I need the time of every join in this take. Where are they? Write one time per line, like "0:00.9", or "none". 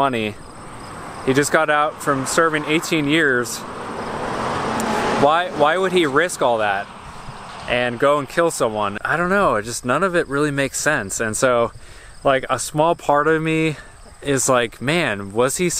0:09.0